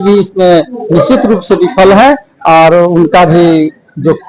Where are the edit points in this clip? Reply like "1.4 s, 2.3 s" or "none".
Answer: none

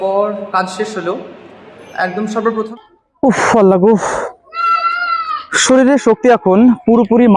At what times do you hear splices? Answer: 2.7 s

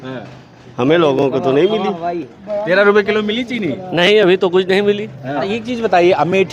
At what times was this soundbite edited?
5.5 s

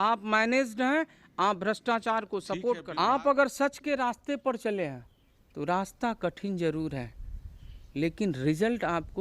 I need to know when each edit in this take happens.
2.9 s

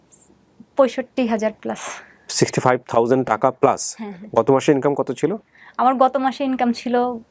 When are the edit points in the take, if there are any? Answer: none

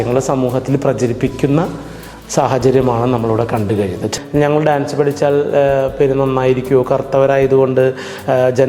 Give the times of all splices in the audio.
4.1 s

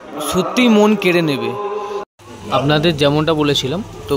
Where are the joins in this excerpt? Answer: 2.0 s

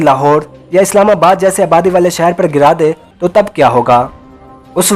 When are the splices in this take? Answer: 3.1 s

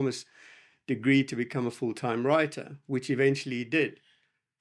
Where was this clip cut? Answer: none

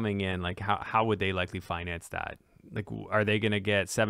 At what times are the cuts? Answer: none

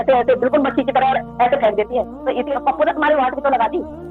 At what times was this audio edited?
2.5 s

